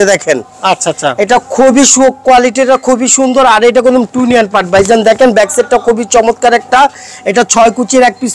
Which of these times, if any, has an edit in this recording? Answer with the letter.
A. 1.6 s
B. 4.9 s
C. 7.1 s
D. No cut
D